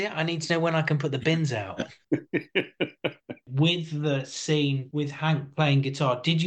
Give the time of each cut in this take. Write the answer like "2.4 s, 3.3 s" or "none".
2.0 s, 3.4 s, 4.8 s

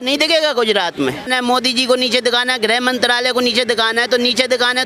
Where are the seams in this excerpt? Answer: 1.3 s

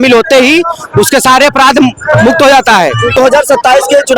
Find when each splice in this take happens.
none

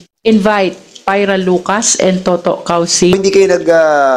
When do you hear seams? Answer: 3.1 s

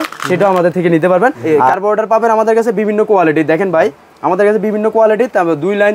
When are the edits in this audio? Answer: 1.4 s

